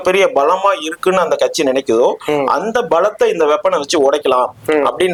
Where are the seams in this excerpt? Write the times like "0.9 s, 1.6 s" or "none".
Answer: none